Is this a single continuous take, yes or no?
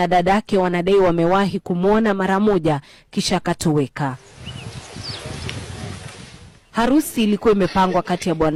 yes